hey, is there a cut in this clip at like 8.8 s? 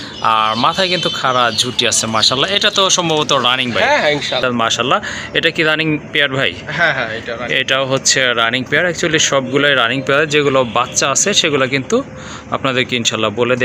no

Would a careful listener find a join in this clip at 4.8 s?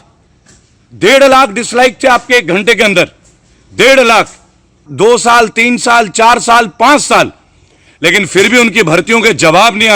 yes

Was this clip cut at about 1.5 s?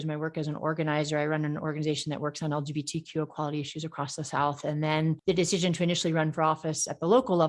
no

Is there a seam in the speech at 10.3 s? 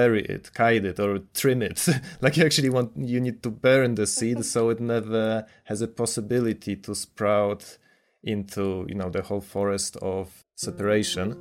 yes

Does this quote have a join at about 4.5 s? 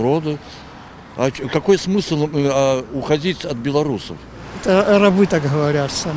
yes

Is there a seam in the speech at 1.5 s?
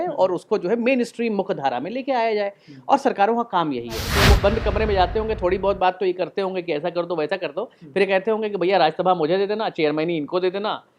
no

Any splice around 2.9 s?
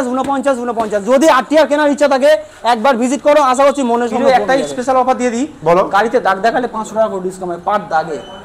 no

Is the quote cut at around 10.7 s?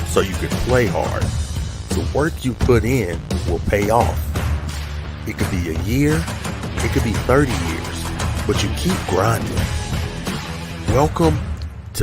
yes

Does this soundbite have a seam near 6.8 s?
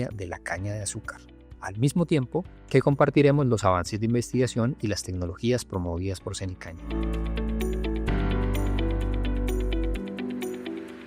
yes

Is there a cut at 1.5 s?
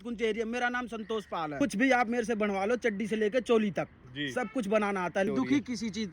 yes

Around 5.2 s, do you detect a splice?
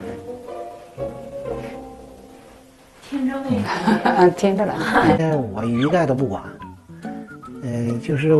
yes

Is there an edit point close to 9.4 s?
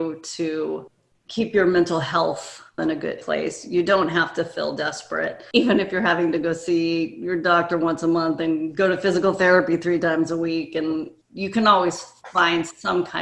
no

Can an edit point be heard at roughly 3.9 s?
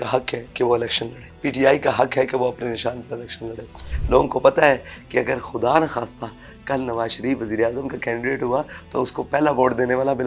yes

